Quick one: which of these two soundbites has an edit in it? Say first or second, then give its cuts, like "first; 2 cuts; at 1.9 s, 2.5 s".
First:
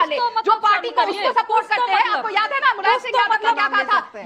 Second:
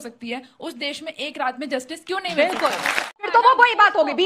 second; 1 cut; at 3.3 s